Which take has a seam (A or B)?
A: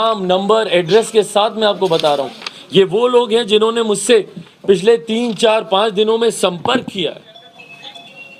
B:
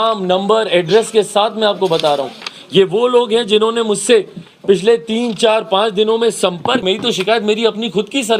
B